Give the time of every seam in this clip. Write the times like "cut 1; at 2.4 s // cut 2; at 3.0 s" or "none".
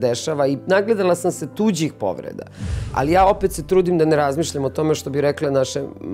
none